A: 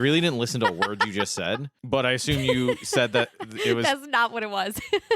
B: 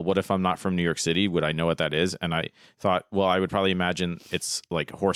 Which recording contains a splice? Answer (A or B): A